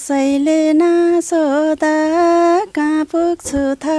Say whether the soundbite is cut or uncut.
uncut